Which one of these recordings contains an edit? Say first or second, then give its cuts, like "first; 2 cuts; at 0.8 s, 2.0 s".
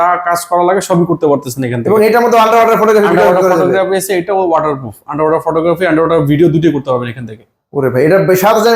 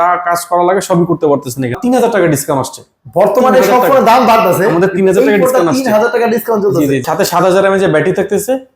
second; 2 cuts; at 1.8 s, 7.1 s